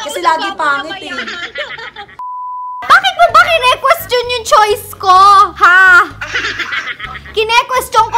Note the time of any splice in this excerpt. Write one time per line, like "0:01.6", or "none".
0:02.2